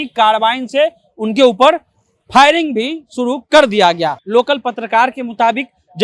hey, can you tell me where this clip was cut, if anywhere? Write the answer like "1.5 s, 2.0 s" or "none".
4.2 s